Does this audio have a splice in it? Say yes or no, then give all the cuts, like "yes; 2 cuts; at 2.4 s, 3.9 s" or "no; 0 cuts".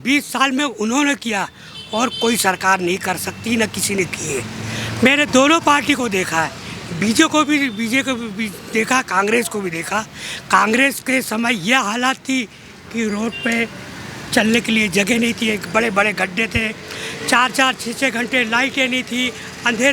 no; 0 cuts